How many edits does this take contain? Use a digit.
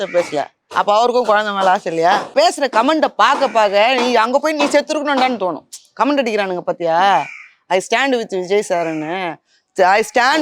1